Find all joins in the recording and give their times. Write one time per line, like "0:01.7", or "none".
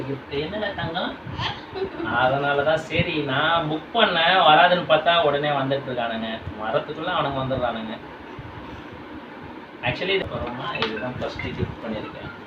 0:10.2